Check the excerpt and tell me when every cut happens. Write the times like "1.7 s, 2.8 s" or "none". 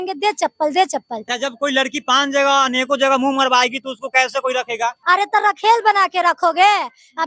1.4 s, 5.0 s